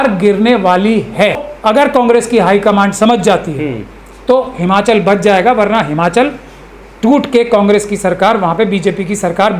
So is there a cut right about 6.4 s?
no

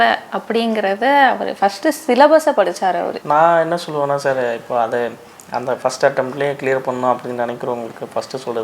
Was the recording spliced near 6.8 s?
no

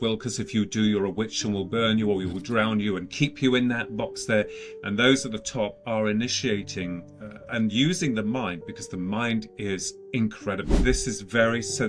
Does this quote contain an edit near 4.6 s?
no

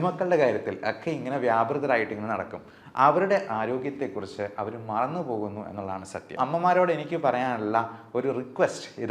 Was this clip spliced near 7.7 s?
no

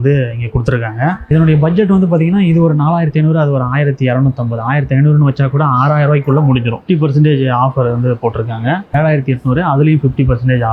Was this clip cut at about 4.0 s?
no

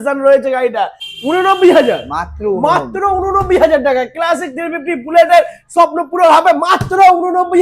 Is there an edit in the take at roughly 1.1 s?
yes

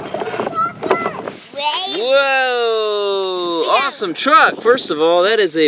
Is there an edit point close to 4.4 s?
no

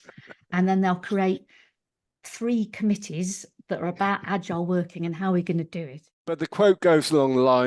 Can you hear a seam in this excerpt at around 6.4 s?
yes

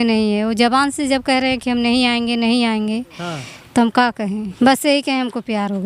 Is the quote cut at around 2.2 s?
no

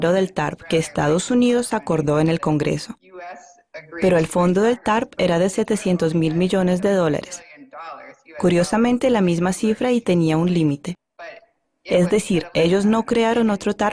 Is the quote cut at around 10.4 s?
no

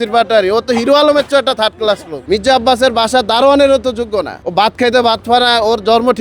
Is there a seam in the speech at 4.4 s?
yes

